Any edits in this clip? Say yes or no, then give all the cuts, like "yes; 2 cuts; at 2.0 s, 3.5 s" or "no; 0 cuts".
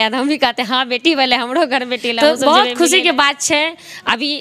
yes; 1 cut; at 2.1 s